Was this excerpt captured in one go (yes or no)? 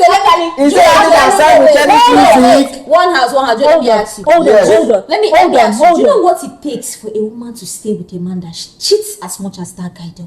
yes